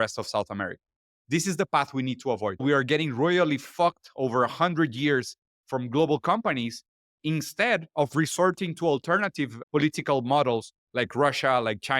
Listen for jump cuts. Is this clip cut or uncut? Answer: cut